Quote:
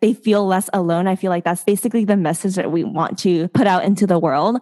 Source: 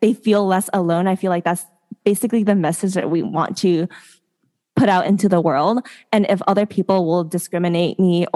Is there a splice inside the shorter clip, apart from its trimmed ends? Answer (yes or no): yes